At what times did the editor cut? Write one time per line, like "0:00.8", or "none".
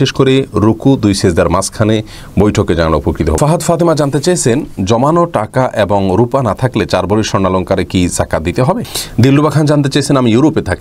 0:03.4
0:08.9